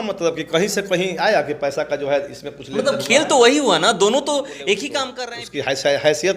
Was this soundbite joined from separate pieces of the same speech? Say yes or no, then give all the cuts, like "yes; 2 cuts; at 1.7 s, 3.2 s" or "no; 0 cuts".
yes; 1 cut; at 5.0 s